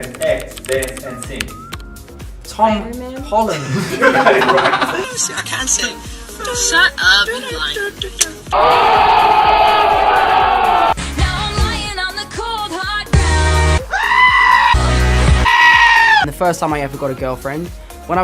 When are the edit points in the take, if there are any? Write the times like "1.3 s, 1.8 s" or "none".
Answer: 1.5 s